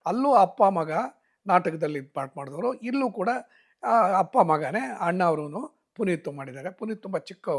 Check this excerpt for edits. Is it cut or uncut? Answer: uncut